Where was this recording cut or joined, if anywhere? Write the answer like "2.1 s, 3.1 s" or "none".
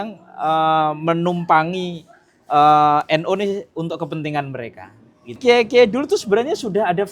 5.4 s

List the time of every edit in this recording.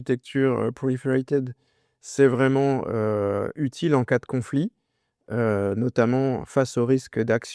none

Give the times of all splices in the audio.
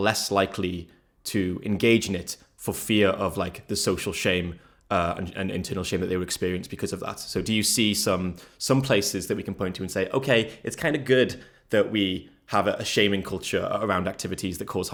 none

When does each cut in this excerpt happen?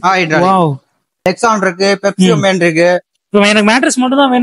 1.2 s

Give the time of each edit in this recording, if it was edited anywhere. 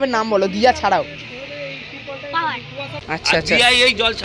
3.0 s

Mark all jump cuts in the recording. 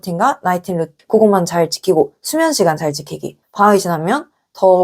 1.0 s, 3.4 s

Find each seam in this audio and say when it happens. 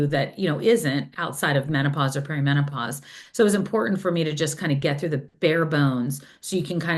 none

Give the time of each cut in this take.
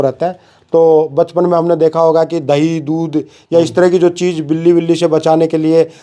none

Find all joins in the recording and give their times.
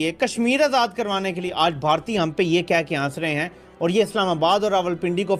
none

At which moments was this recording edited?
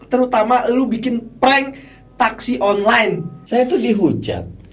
3.3 s

